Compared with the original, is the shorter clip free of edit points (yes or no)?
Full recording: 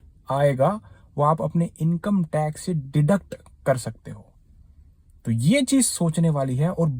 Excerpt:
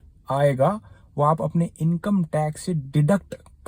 yes